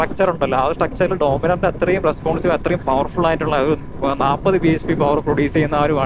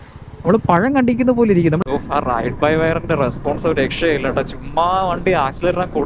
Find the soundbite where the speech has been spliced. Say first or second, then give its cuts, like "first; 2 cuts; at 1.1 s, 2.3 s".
second; 1 cut; at 1.9 s